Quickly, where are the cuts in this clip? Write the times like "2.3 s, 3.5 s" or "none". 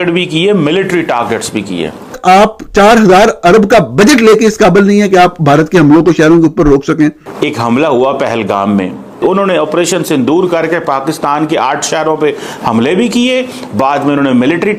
2.2 s, 7.3 s